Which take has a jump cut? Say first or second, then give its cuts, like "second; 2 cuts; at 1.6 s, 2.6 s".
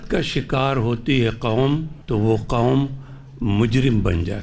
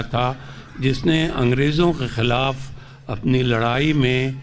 first; 1 cut; at 1.9 s